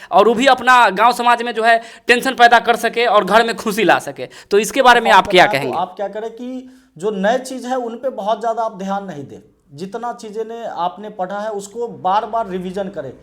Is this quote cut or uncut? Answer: cut